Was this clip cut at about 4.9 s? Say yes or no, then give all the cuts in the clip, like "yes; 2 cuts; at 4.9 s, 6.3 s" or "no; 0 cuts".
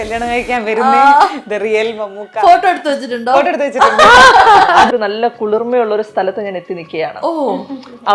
yes; 1 cut; at 4.9 s